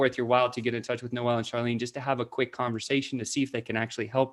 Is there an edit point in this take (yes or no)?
no